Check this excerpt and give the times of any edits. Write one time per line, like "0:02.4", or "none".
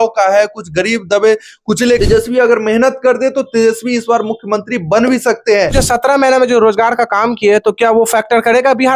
0:02.0
0:05.7